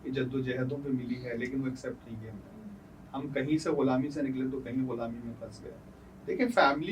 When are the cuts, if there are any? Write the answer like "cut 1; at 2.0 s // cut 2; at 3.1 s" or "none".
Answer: none